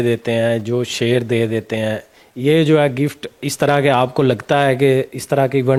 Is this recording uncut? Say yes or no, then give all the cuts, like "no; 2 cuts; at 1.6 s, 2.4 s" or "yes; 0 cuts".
yes; 0 cuts